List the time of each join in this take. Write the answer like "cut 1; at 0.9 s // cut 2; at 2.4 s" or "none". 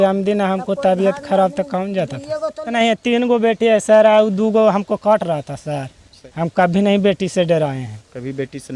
cut 1; at 2.7 s // cut 2; at 6.2 s